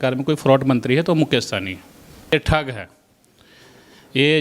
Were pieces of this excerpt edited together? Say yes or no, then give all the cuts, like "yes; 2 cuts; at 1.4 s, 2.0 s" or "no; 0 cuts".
yes; 1 cut; at 2.3 s